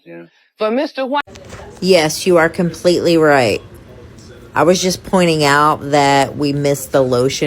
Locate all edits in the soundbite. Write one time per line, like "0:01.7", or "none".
0:01.3